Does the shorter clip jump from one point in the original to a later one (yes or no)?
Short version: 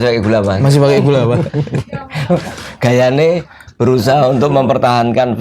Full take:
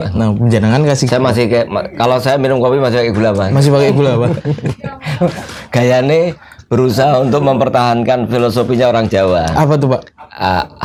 no